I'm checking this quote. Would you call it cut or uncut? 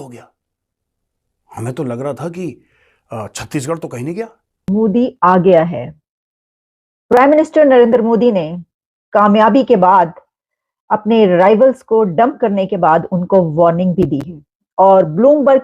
cut